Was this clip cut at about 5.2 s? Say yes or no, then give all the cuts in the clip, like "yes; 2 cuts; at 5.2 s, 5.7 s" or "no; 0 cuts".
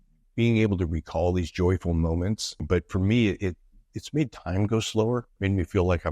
no; 1 cut; at 2.6 s